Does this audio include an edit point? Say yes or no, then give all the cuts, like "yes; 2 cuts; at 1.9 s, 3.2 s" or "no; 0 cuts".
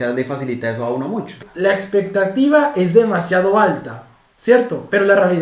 yes; 1 cut; at 1.4 s